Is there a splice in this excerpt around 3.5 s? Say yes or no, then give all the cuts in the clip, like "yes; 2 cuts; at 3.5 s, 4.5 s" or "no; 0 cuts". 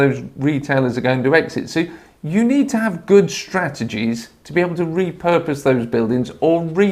no; 0 cuts